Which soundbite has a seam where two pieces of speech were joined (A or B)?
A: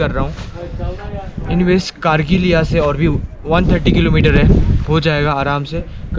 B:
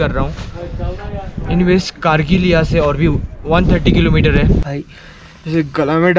B